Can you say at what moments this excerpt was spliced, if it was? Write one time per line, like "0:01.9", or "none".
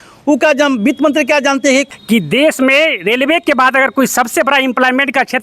0:01.9